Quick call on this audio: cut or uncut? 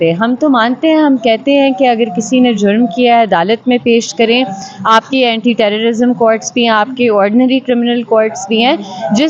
uncut